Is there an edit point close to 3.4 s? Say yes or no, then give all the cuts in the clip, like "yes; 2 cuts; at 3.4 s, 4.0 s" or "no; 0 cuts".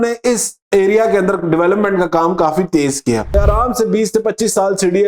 yes; 1 cut; at 3.4 s